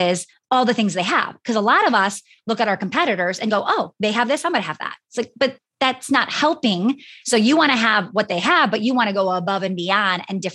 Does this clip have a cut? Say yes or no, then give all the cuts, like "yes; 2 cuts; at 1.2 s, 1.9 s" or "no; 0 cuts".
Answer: yes; 1 cut; at 7.1 s